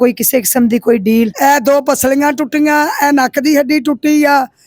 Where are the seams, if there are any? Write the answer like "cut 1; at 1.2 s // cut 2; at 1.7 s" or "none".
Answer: cut 1; at 1.3 s

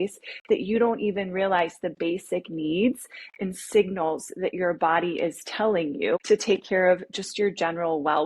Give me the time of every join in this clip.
cut 1; at 6.2 s

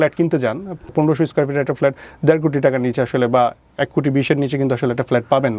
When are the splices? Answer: cut 1; at 0.9 s

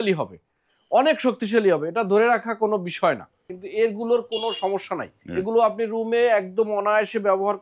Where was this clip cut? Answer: cut 1; at 3.5 s // cut 2; at 5.1 s

